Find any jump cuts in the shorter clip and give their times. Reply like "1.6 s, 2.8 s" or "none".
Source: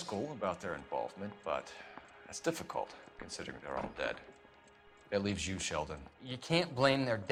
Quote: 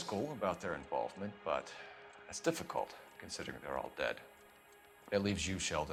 none